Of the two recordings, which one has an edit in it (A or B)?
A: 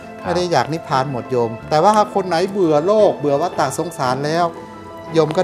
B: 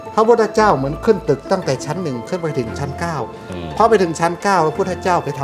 A